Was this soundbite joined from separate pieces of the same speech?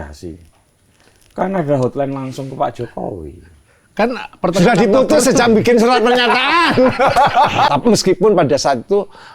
yes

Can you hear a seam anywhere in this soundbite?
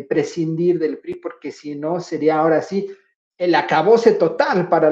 no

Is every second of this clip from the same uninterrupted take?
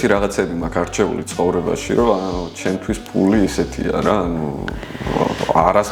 yes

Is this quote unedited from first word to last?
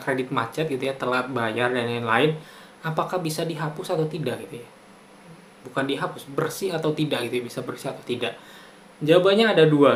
yes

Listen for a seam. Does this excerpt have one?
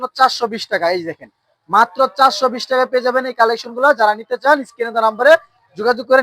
no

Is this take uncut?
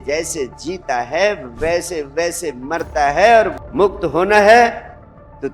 no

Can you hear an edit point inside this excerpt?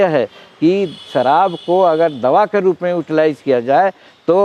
no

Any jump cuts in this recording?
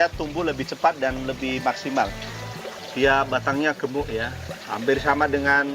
yes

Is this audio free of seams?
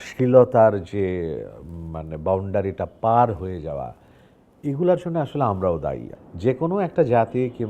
no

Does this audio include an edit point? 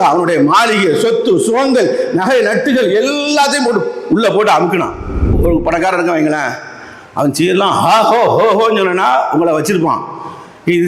yes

